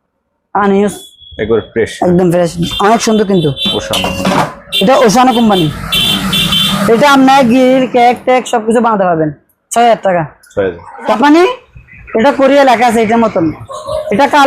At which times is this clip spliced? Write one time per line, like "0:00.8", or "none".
0:11.1